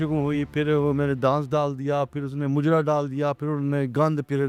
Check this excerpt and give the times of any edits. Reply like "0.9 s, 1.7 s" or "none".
none